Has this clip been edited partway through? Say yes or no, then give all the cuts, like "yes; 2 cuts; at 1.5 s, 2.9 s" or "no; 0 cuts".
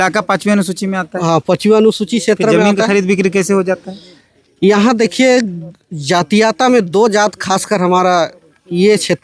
no; 0 cuts